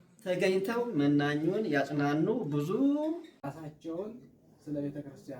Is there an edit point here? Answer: yes; 1 cut; at 3.3 s

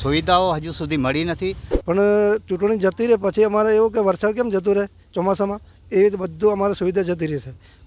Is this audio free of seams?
no; 1 cut; at 1.7 s

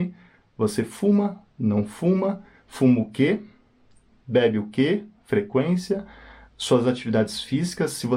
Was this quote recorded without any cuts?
yes; 0 cuts

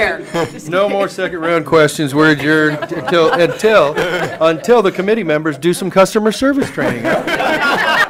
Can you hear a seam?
no; 0 cuts

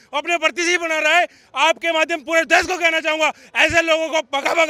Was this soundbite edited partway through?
no; 0 cuts

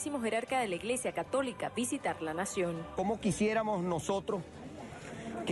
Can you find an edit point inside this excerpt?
yes; 1 cut; at 4.2 s

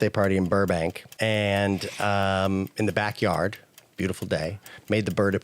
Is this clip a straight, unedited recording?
no; 1 cut; at 1.1 s

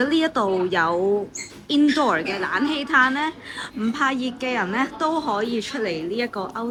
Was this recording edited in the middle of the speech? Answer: no; 0 cuts

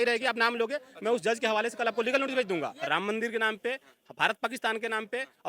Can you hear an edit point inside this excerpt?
yes; 1 cut; at 2.8 s

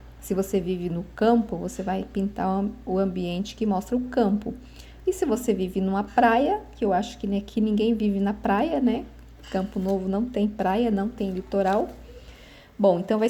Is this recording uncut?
yes; 0 cuts

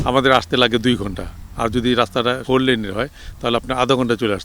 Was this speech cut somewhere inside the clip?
yes; 1 cut; at 2.4 s

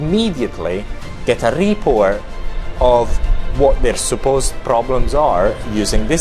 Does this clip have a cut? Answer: no; 0 cuts

